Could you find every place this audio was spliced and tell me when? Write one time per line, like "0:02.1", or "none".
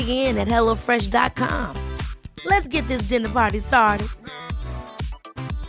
none